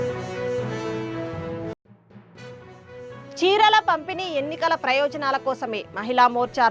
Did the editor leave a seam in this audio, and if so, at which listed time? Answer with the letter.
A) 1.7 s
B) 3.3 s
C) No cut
A